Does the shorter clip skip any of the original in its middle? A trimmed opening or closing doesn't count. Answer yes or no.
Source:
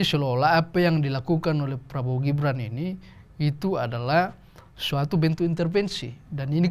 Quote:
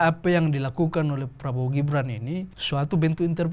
yes